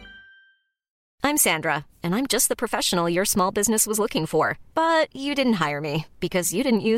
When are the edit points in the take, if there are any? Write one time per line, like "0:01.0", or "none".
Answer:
0:01.0